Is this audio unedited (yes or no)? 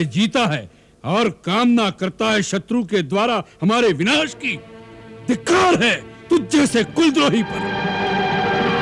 yes